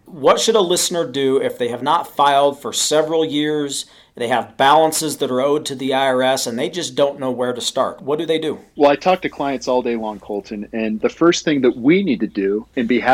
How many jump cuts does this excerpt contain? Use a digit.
1